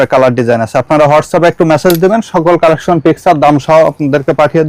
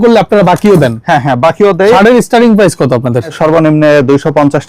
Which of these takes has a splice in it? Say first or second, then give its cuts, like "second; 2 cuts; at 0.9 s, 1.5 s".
second; 2 cuts; at 2.0 s, 3.3 s